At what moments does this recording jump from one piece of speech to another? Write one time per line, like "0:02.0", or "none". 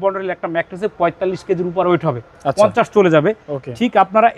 none

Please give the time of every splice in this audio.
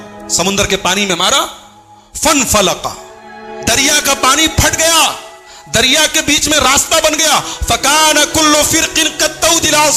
none

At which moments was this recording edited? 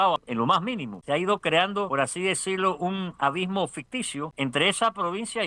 0:00.8
0:01.9
0:04.3

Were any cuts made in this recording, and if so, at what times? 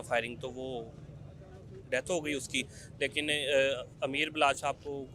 none

